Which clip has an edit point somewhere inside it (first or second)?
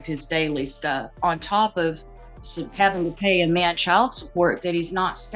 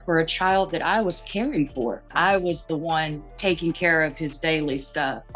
second